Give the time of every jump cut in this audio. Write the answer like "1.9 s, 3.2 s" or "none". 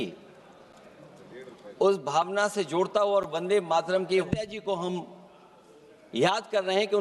4.3 s